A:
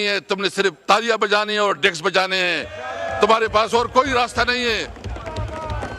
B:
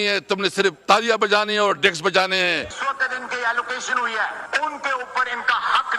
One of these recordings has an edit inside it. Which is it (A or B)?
B